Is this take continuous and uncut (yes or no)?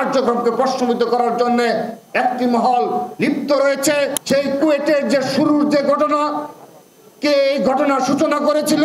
no